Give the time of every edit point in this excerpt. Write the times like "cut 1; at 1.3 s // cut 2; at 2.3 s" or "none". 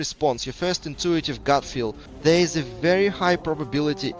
cut 1; at 2.0 s